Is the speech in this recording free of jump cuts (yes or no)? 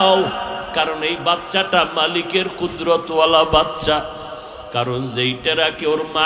yes